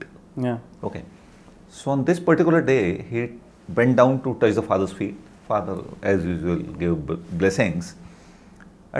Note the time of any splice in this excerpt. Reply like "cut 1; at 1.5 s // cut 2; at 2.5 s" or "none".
none

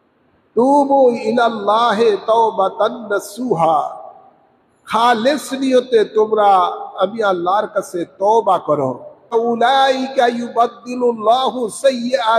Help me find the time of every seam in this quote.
cut 1; at 9.3 s

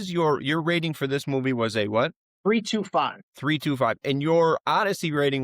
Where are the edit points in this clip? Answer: cut 1; at 2.3 s // cut 2; at 3.3 s

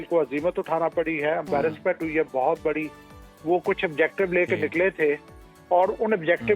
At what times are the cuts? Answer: none

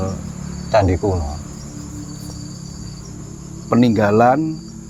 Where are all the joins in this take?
none

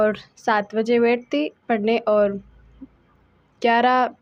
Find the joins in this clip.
none

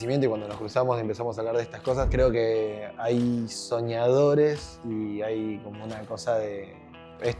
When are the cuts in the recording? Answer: cut 1; at 2.1 s

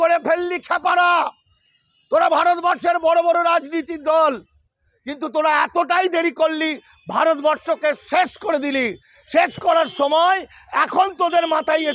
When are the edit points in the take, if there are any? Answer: none

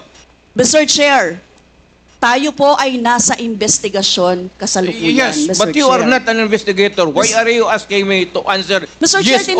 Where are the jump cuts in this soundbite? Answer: none

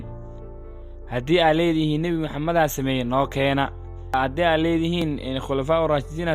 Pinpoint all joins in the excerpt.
cut 1; at 4.1 s

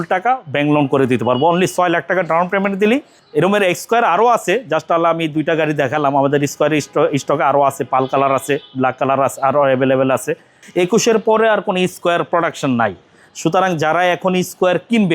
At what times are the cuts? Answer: cut 1; at 3.2 s // cut 2; at 10.6 s

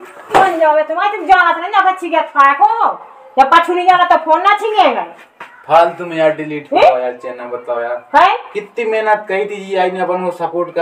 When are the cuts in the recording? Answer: none

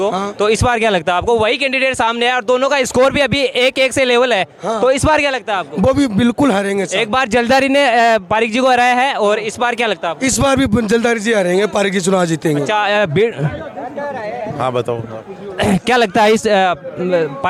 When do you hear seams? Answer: none

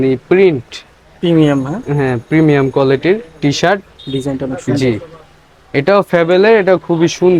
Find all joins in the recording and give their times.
none

